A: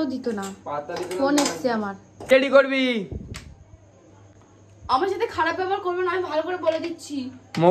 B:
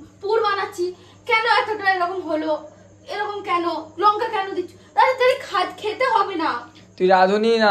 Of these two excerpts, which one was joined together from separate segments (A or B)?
A